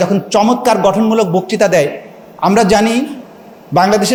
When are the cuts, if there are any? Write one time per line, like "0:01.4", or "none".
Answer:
none